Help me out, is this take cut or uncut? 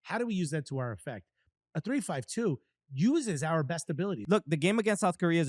cut